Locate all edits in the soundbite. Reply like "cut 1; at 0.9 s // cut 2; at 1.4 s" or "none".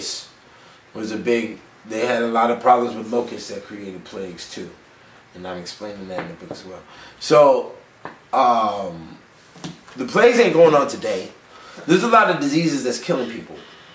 none